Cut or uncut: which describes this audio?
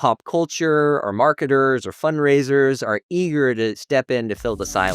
cut